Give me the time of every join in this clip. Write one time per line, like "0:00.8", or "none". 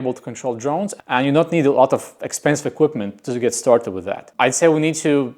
0:01.0
0:04.2